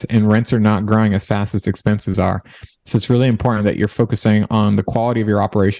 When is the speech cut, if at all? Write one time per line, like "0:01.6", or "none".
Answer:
none